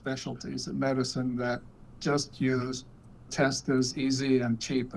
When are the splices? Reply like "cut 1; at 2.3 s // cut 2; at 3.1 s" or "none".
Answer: none